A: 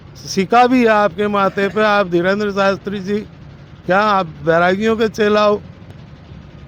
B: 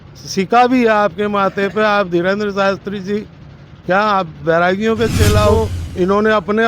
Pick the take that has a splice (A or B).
B